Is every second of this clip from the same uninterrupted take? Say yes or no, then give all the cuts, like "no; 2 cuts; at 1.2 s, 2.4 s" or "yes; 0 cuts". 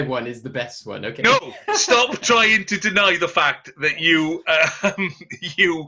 yes; 0 cuts